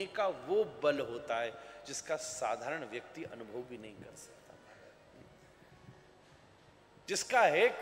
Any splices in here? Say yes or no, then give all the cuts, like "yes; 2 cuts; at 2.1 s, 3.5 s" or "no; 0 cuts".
no; 0 cuts